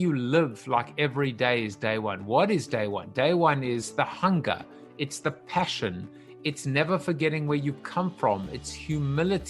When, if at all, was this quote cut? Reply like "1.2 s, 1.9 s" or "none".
3.9 s